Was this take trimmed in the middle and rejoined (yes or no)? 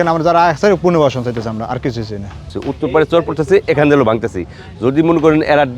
yes